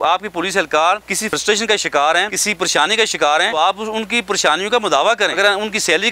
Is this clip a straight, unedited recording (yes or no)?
no